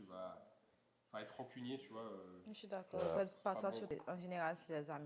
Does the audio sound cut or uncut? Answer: cut